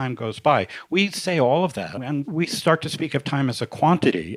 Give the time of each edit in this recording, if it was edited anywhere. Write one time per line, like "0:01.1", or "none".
0:02.3